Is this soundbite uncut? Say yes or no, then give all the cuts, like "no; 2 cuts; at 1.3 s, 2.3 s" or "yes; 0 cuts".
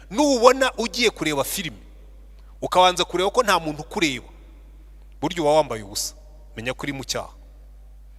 yes; 0 cuts